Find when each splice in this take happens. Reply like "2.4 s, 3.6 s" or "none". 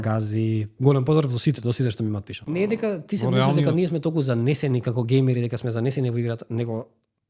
2.5 s